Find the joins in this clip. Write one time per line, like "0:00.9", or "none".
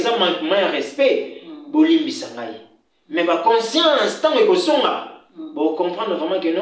none